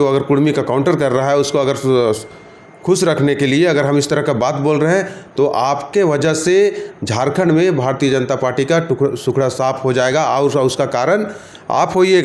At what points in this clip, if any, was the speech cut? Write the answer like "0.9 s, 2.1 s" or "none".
none

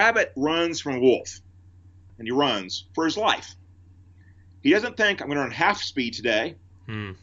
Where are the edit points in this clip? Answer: 2.1 s

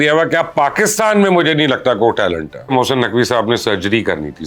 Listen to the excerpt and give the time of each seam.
2.7 s

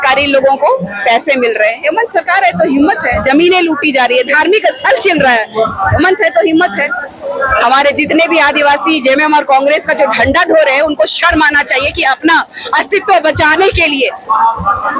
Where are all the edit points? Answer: none

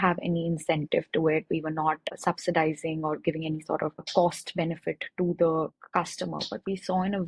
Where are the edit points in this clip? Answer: 2.1 s, 4.1 s

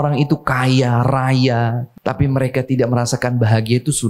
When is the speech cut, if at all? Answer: 1.9 s

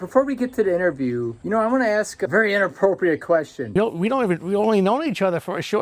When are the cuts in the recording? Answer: 1.4 s, 2.2 s, 3.8 s

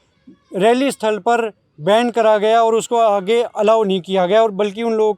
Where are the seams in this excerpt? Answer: none

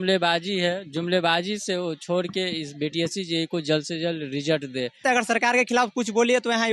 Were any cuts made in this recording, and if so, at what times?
5.0 s

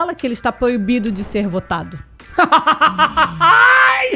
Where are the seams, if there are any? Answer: none

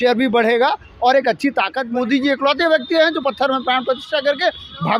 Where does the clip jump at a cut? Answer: 1.8 s

